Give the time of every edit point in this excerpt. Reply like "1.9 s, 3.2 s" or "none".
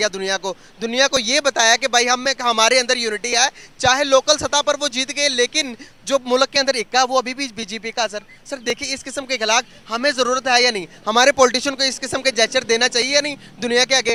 none